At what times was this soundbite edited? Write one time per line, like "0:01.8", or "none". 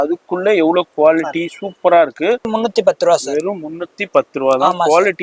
0:02.5